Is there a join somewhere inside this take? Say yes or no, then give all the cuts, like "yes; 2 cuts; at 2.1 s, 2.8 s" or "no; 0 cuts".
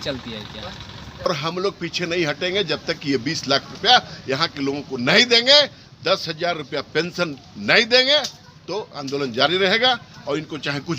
yes; 1 cut; at 1.3 s